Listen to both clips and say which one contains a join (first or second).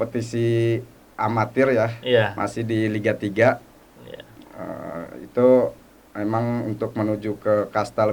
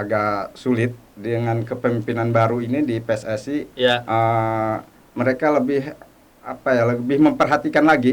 second